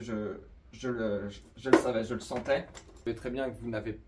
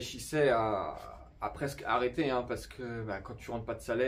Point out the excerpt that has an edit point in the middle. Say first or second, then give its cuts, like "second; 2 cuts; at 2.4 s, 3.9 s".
first; 1 cut; at 3.1 s